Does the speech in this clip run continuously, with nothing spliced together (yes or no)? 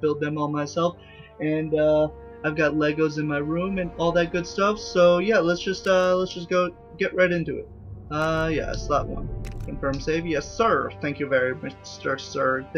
no